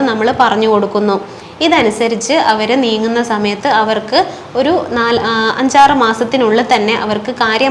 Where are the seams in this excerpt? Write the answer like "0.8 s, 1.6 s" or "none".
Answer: none